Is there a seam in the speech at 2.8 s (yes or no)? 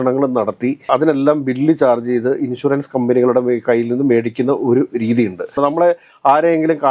no